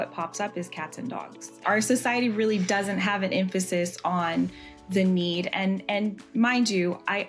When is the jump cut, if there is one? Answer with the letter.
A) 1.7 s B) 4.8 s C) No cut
A